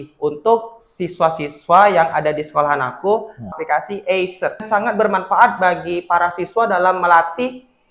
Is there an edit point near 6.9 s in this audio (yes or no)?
no